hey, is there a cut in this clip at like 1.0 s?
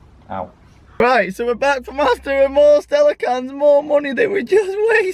yes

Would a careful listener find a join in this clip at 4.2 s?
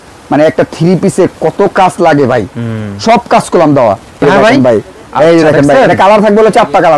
yes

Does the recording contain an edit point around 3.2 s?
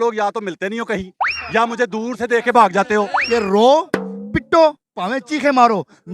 yes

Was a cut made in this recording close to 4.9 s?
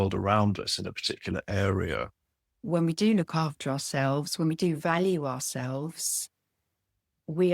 no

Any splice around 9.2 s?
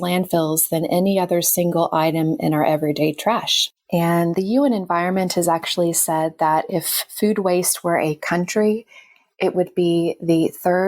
no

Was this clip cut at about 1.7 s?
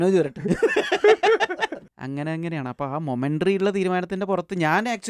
no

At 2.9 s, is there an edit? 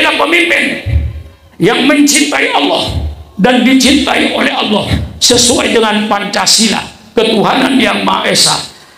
no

